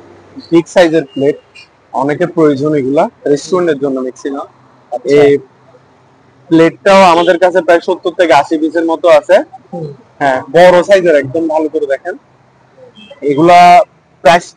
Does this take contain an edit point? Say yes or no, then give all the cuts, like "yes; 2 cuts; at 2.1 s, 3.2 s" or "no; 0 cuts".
no; 0 cuts